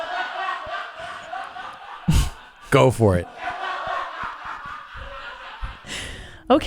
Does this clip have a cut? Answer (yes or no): yes